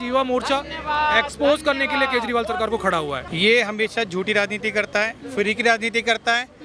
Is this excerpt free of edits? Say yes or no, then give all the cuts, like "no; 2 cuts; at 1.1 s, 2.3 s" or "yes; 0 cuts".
no; 1 cut; at 3.2 s